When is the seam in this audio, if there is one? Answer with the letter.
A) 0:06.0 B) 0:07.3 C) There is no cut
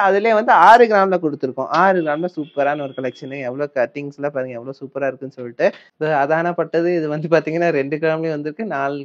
A